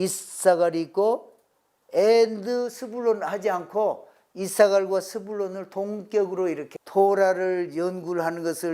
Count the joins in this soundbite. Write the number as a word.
one